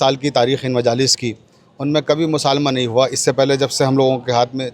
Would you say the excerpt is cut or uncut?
uncut